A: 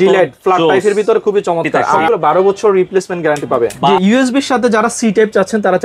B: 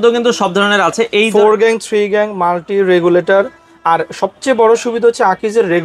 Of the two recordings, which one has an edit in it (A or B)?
A